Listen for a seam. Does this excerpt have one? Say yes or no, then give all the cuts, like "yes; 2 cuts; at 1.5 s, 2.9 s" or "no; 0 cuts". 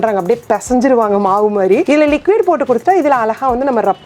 yes; 1 cut; at 1.8 s